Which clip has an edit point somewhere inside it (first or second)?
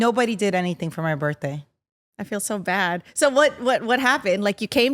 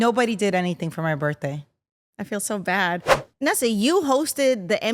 second